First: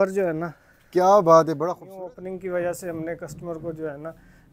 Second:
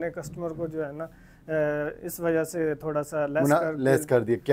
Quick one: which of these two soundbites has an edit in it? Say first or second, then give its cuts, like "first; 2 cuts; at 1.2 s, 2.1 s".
first; 1 cut; at 1.8 s